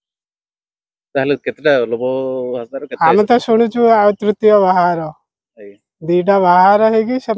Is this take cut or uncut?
uncut